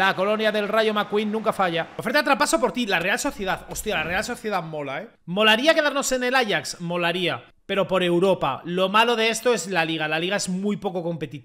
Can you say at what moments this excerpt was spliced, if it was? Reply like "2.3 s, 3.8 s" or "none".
1.9 s, 5.1 s